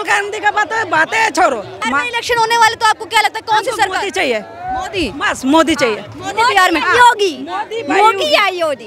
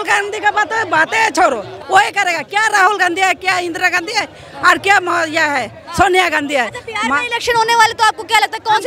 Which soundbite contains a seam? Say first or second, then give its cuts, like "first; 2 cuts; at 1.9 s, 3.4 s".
first; 1 cut; at 1.7 s